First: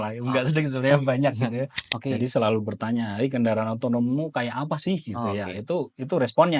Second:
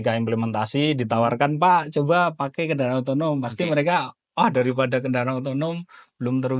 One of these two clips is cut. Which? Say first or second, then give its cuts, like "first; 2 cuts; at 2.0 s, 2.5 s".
first; 1 cut; at 1.8 s